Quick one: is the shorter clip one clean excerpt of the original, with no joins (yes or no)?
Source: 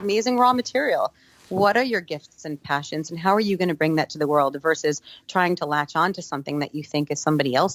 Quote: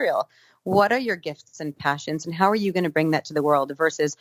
yes